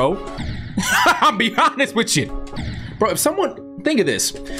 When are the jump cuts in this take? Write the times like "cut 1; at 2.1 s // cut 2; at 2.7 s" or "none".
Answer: cut 1; at 2.3 s